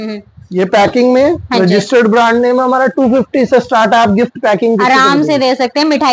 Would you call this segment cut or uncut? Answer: uncut